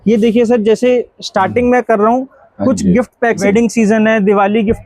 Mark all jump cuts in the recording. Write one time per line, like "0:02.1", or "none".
0:03.4